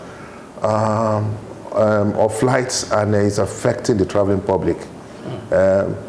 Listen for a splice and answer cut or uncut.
uncut